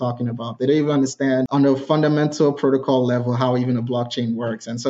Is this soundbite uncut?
no; 1 cut; at 1.5 s

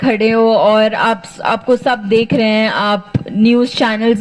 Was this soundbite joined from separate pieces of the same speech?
no; 0 cuts

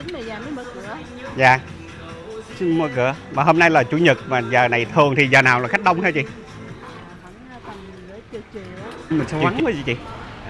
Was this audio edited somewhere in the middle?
yes; 1 cut; at 9.1 s

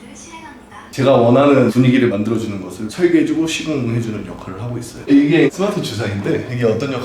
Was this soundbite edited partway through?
yes; 2 cuts; at 0.9 s, 5.0 s

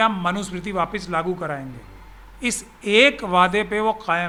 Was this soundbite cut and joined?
no; 0 cuts

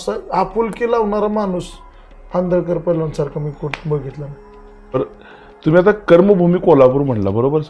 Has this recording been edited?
yes; 1 cut; at 4.9 s

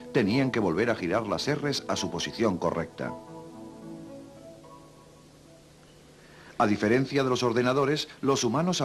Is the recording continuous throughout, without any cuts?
no; 1 cut; at 1.8 s

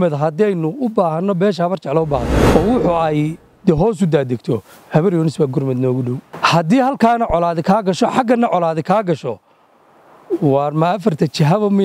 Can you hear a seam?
yes; 2 cuts; at 2.3 s, 6.3 s

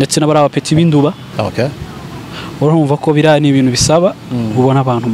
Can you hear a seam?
yes; 1 cut; at 1.2 s

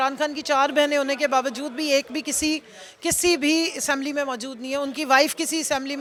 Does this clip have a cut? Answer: no; 0 cuts

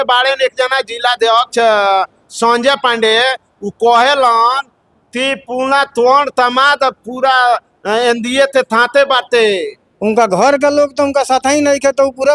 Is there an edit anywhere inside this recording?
no; 0 cuts

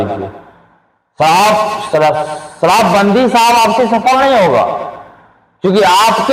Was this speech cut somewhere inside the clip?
no; 0 cuts

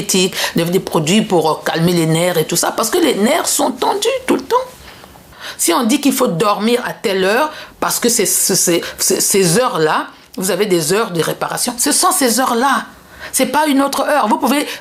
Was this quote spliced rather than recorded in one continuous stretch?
yes; 1 cut; at 5.2 s

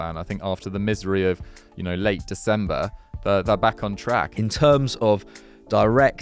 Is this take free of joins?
no; 1 cut; at 4.3 s

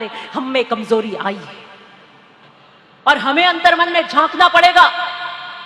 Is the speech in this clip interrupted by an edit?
yes; 1 cut; at 2.6 s

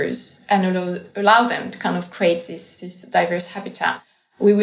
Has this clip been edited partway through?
no; 0 cuts

